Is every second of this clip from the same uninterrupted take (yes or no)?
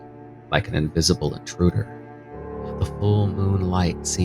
yes